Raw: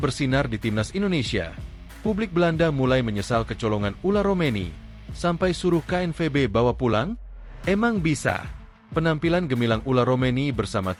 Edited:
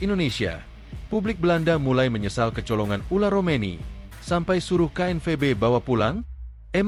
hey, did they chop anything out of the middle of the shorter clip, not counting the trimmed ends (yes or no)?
no